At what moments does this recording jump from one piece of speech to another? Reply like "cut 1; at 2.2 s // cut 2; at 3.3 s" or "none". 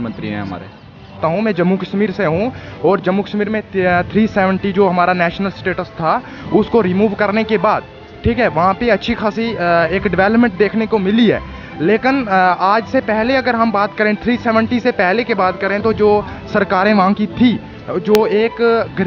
cut 1; at 1.2 s